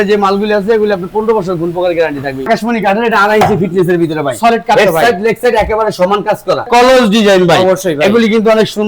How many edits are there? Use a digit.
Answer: 2